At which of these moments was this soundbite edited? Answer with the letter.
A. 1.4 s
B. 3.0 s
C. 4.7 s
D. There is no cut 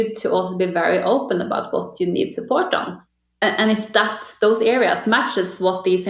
B